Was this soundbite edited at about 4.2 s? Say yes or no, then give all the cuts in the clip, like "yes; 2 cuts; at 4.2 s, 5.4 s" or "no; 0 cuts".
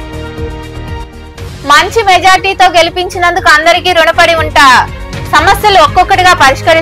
no; 1 cut; at 1.0 s